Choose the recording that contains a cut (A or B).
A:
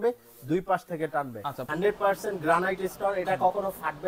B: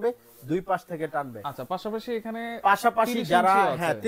A